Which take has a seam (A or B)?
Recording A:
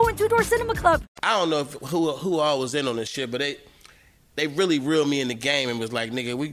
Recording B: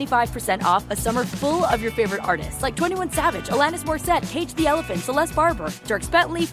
A